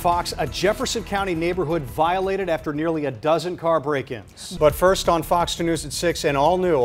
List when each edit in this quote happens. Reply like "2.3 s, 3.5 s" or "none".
4.5 s